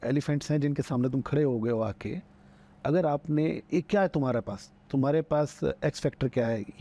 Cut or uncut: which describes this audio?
uncut